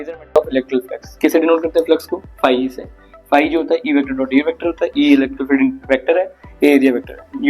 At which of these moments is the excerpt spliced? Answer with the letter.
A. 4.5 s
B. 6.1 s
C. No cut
C